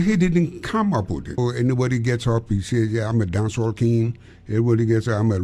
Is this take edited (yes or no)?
yes